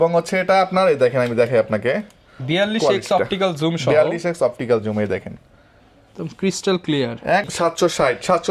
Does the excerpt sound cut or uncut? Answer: cut